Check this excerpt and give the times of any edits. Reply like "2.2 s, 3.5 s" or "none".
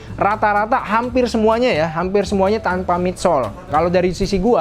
3.7 s